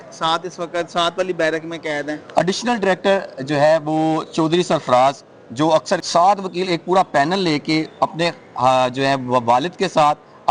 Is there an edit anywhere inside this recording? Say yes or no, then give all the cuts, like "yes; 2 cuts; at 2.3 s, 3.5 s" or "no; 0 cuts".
yes; 1 cut; at 6.0 s